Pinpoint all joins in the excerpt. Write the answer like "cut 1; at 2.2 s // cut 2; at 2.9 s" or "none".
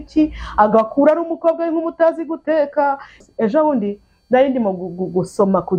cut 1; at 3.2 s